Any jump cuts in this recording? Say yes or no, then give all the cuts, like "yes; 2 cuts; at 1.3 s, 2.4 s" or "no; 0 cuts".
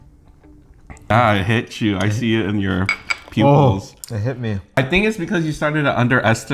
yes; 2 cuts; at 1.1 s, 4.8 s